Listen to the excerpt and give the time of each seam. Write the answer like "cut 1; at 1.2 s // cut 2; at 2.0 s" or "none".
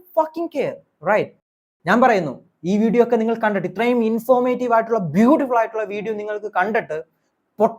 cut 1; at 1.3 s